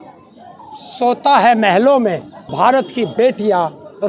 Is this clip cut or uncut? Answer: cut